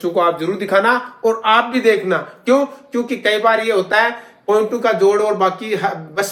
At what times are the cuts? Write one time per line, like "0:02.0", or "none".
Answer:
none